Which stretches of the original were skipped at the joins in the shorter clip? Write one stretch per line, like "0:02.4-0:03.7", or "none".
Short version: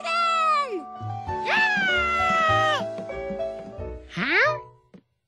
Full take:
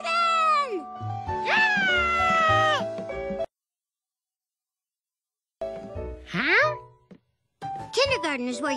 0:03.5-0:05.6